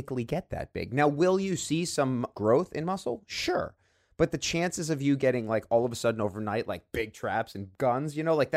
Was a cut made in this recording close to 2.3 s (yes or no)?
yes